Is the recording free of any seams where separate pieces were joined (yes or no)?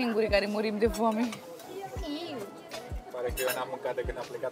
yes